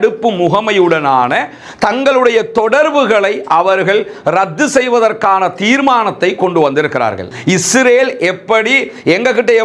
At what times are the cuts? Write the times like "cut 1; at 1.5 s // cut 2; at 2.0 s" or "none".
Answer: cut 1; at 7.2 s